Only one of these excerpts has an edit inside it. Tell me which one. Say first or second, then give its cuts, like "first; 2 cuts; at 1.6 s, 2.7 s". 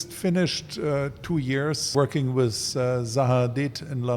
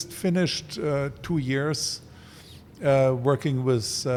first; 1 cut; at 1.9 s